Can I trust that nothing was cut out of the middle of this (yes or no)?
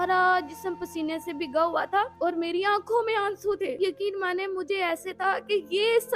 no